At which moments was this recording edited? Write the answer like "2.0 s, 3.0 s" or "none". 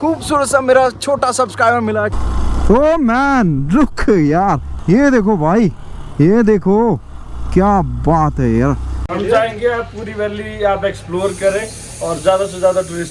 2.1 s, 4.7 s, 9.0 s